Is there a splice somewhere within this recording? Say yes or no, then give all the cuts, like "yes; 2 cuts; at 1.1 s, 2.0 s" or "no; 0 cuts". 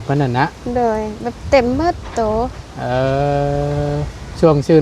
no; 0 cuts